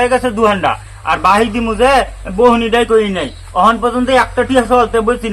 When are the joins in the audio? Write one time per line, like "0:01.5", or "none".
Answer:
none

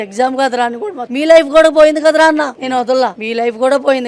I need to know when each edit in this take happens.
0:01.0
0:03.0

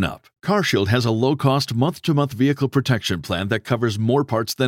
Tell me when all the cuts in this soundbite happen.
none

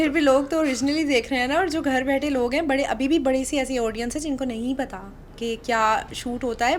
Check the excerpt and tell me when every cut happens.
none

